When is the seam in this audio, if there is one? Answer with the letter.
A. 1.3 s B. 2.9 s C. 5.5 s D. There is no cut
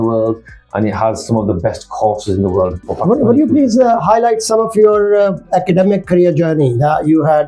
B